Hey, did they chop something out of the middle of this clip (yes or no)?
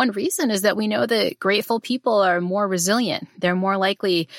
no